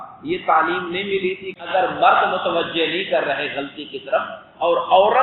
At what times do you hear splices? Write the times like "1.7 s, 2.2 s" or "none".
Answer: 1.5 s